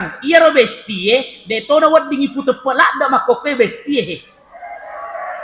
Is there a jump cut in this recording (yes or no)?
no